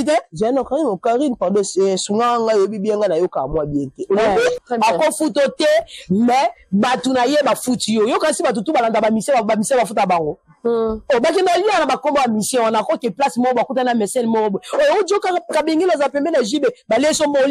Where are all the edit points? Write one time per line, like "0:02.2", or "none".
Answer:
0:04.6

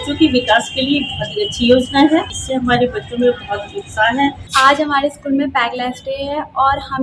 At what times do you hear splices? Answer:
0:02.4
0:04.6

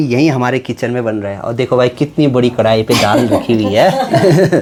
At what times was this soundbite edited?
none

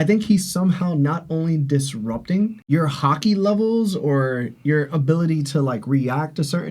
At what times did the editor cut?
0:02.6

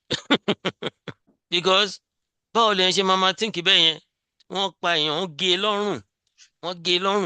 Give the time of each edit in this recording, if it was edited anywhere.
0:01.4

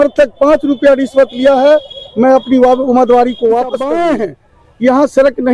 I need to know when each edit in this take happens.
0:03.8

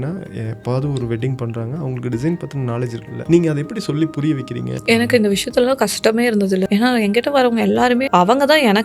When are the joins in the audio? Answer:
0:03.1
0:04.7
0:06.7
0:08.1

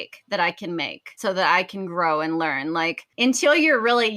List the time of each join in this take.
0:01.2
0:03.1

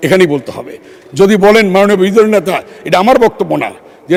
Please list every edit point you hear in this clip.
none

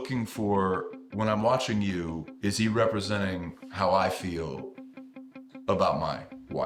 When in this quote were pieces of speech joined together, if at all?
none

